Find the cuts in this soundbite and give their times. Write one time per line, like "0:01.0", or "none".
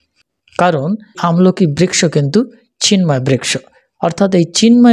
0:01.1